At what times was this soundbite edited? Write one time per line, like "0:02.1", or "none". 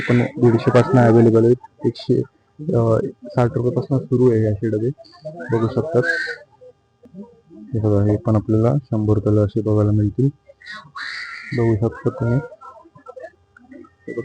none